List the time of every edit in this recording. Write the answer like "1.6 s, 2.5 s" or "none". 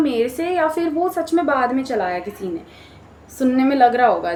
none